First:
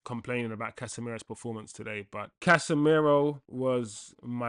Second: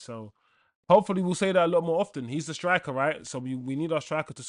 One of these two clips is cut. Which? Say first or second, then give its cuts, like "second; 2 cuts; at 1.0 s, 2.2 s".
first; 2 cuts; at 2.3 s, 3.5 s